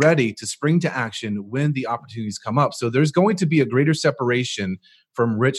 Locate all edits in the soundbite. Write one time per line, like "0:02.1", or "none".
none